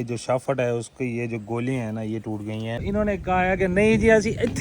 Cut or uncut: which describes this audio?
cut